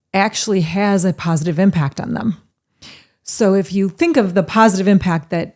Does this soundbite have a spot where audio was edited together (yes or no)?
no